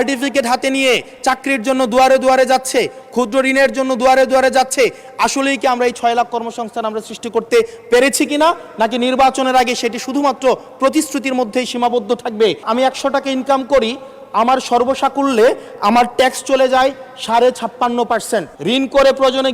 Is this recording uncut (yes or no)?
no